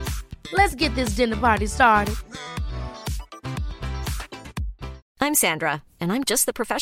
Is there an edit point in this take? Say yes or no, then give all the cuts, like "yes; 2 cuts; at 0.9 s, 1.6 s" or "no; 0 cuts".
yes; 1 cut; at 5.0 s